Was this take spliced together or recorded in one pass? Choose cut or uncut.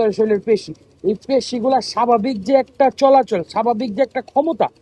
uncut